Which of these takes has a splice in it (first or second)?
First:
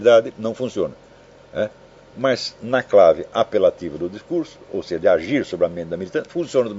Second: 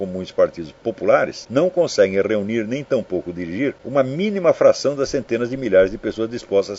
second